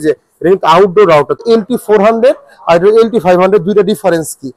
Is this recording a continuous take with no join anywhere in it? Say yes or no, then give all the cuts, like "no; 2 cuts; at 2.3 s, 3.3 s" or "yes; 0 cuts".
no; 1 cut; at 1.4 s